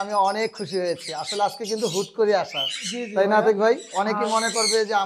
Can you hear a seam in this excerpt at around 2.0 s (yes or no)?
no